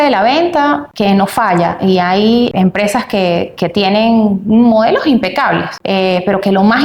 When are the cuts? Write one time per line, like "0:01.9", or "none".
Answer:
0:00.9
0:02.5
0:05.7